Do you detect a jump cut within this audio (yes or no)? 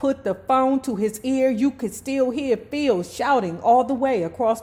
no